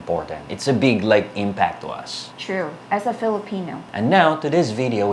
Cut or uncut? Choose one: uncut